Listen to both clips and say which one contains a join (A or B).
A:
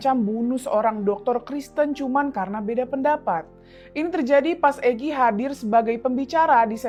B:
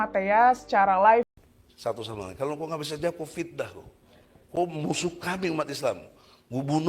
B